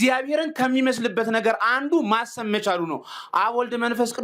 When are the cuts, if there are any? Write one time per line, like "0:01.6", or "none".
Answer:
none